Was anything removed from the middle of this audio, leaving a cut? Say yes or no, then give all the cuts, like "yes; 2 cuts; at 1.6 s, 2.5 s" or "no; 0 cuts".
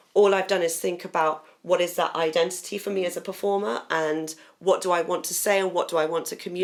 no; 0 cuts